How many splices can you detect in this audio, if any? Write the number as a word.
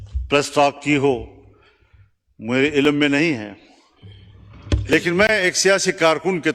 zero